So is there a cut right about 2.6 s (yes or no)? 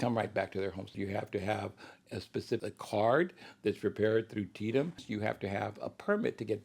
yes